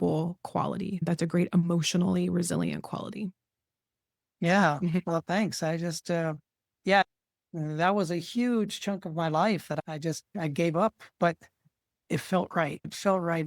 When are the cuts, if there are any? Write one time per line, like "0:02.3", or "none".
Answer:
0:00.9
0:07.0